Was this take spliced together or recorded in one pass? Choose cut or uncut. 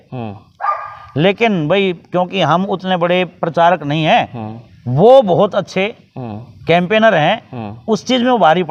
uncut